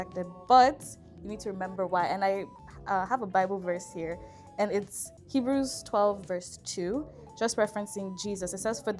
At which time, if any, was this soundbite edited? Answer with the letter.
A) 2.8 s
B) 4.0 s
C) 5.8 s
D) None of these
D